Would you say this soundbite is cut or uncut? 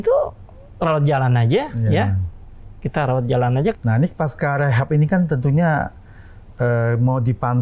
cut